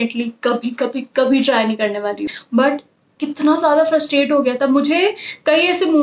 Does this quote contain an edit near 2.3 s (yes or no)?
yes